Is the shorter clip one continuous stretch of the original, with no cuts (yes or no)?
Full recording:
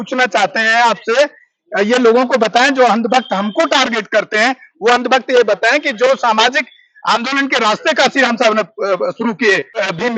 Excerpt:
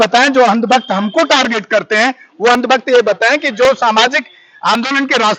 yes